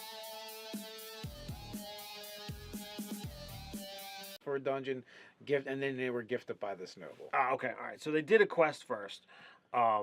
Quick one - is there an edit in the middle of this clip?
no; 0 cuts

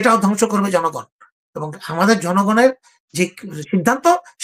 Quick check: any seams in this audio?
no; 0 cuts

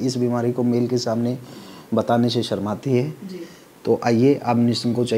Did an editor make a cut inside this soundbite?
no; 0 cuts

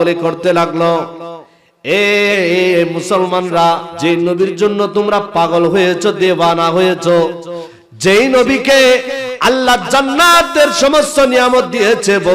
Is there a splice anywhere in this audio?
yes; 1 cut; at 3.9 s

